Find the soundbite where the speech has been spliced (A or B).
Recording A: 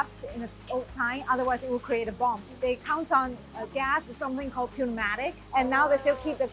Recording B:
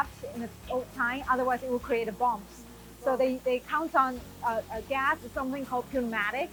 A